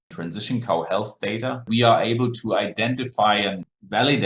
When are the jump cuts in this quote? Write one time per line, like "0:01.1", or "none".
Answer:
0:01.6